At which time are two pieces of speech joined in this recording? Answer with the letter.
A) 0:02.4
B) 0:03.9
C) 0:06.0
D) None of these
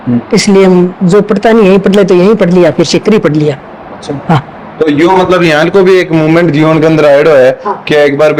D